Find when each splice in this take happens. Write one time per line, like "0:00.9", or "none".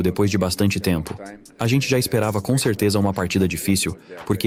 none